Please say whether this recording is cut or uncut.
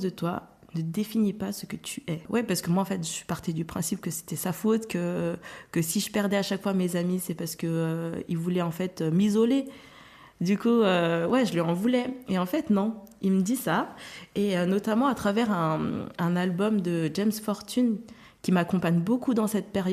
cut